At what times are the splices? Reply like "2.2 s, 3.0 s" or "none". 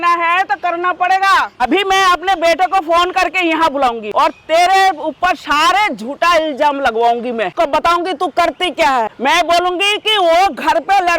1.5 s, 4.0 s, 7.5 s, 9.1 s